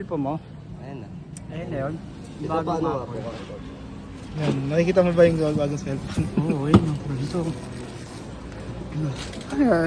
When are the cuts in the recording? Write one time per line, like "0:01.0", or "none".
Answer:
none